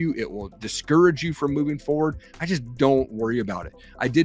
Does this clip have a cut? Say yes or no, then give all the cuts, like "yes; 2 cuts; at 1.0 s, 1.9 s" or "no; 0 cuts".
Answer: no; 0 cuts